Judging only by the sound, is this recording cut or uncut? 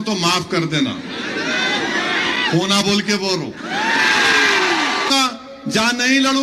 cut